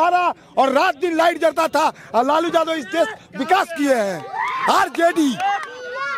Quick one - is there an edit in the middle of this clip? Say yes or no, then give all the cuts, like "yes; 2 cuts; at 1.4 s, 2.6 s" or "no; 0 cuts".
no; 0 cuts